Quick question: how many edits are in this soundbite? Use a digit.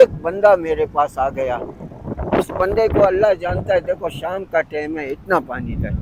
0